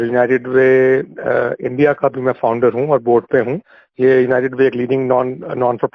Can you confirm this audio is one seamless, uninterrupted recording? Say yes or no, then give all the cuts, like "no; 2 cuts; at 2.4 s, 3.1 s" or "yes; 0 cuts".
no; 1 cut; at 1.1 s